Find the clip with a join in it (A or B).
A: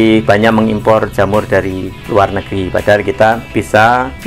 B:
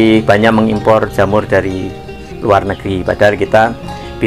A